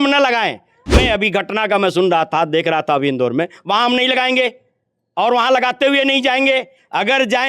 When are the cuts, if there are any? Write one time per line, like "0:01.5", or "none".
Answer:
0:01.0